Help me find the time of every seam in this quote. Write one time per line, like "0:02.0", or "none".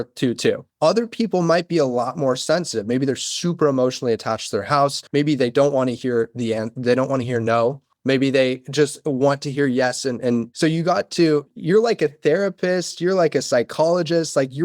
0:11.5